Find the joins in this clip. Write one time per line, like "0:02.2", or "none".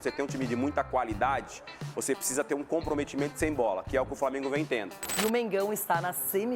0:05.0